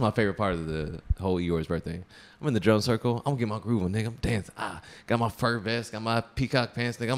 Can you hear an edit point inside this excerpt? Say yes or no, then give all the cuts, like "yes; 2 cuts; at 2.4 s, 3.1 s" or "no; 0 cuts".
no; 0 cuts